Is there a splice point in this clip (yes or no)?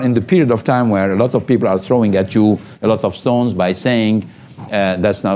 no